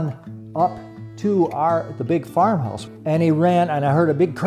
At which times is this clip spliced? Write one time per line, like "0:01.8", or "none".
0:02.7